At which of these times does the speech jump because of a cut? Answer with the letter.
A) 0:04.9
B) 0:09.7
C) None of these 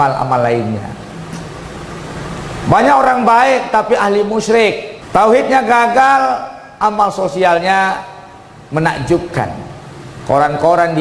A